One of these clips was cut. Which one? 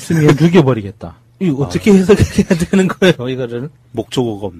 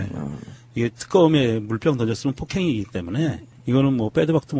first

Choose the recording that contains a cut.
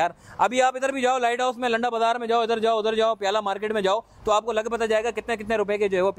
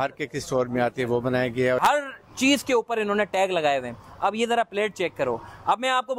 second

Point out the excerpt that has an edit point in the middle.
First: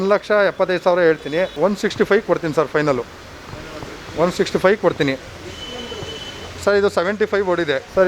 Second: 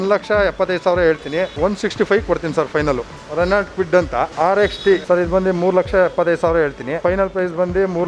second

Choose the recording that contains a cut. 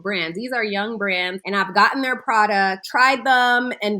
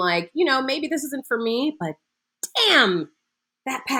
first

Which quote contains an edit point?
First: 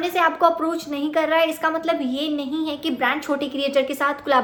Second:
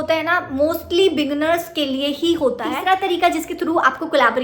second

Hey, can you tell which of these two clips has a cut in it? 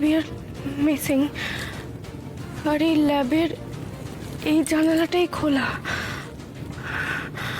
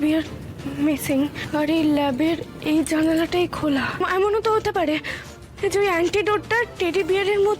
second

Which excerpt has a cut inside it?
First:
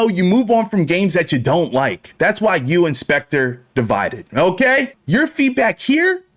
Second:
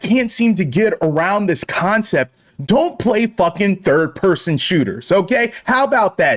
first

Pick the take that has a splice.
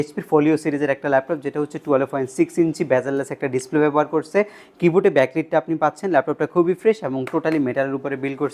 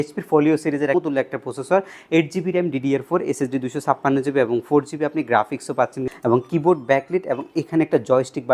second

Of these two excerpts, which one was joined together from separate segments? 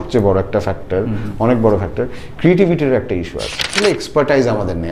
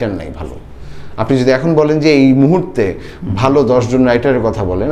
first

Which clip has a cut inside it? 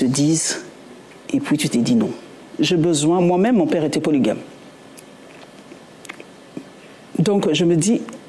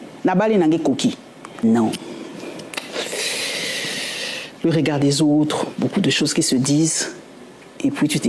second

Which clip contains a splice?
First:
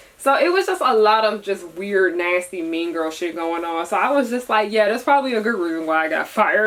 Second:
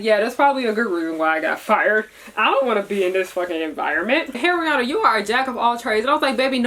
second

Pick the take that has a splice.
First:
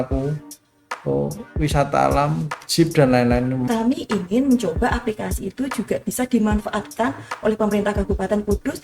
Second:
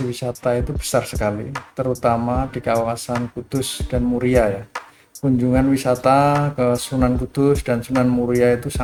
first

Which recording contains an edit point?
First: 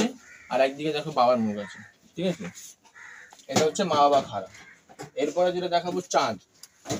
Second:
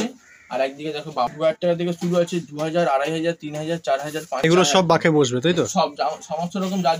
second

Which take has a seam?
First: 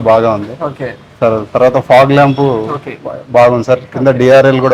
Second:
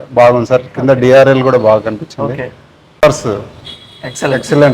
second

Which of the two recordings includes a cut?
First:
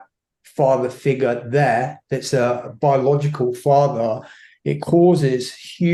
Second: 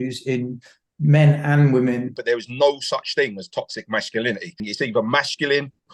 second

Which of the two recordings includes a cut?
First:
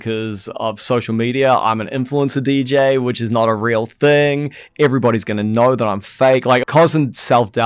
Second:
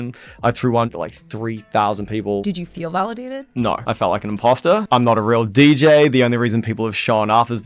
second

